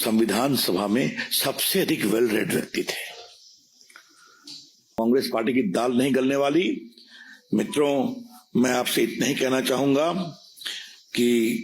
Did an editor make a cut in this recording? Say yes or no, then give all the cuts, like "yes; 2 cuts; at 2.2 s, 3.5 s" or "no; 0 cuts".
yes; 1 cut; at 5.0 s